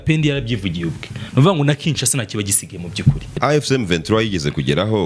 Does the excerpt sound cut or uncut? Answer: cut